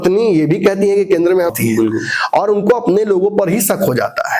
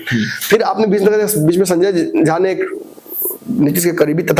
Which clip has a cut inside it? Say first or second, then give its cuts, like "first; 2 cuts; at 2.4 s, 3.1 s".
first; 1 cut; at 1.5 s